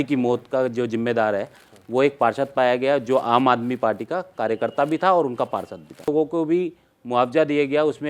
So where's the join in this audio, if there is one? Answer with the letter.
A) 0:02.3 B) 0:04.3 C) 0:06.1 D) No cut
C